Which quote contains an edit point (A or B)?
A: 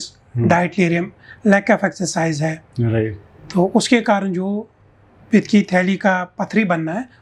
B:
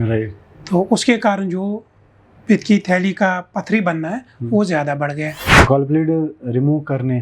B